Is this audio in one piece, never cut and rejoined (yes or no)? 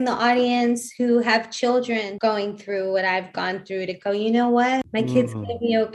no